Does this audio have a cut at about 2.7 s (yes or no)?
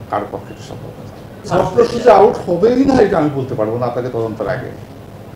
no